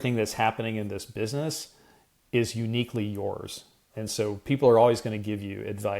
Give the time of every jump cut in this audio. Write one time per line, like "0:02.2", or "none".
0:03.7